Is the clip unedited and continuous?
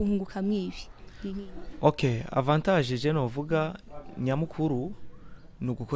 yes; 0 cuts

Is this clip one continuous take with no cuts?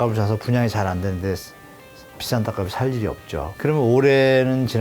no; 1 cut; at 3.5 s

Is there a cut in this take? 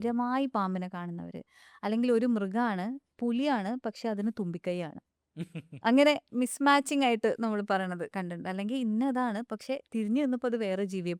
no; 0 cuts

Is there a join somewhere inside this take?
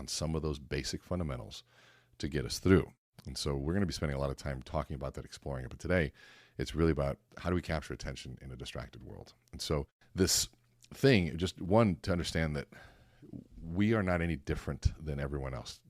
yes; 2 cuts; at 7.3 s, 10.0 s

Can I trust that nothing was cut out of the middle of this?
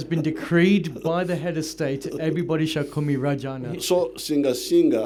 yes; 0 cuts

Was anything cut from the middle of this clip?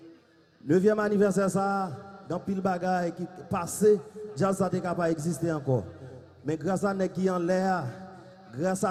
no; 0 cuts

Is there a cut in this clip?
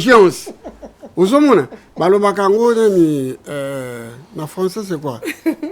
no; 0 cuts

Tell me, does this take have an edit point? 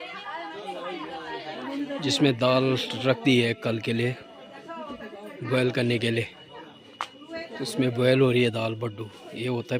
no; 0 cuts

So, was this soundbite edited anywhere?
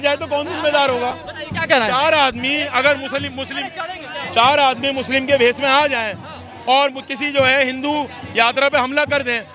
no; 0 cuts

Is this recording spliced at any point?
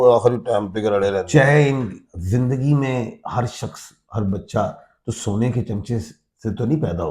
yes; 1 cut; at 1.3 s

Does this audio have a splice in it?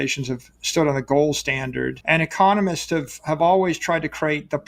yes; 1 cut; at 2.0 s

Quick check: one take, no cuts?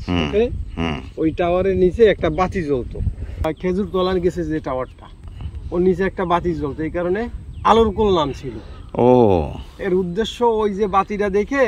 yes; 0 cuts

